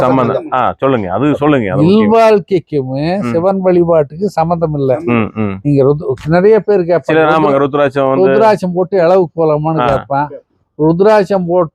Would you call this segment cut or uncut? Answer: uncut